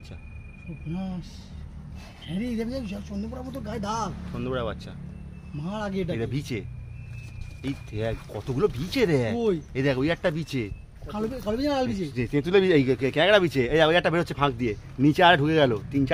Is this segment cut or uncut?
uncut